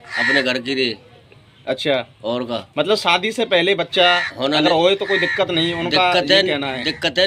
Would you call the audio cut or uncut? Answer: uncut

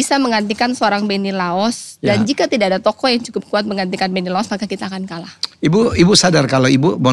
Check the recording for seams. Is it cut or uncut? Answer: uncut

